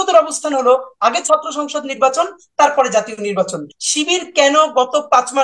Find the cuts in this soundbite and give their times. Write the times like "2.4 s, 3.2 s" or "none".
3.7 s